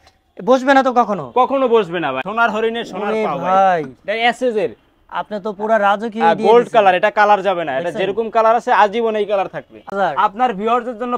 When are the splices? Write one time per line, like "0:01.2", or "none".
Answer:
0:02.2
0:09.8

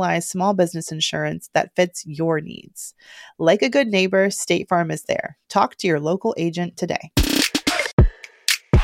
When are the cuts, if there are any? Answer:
0:07.9

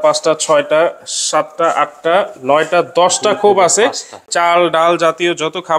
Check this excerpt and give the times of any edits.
0:04.2

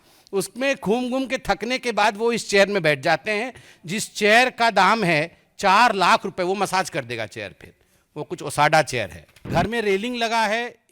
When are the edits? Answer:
0:09.5

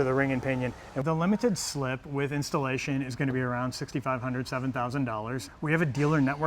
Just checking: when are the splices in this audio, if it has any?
0:01.0
0:05.5

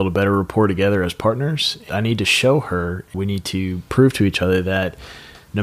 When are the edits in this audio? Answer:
0:01.9
0:03.1

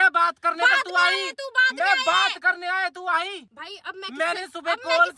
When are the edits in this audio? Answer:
none

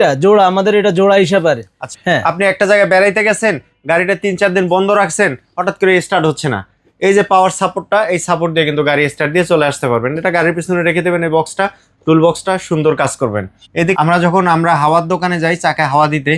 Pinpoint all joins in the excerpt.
0:01.9
0:14.0

